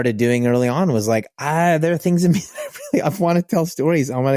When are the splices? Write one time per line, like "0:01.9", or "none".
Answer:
none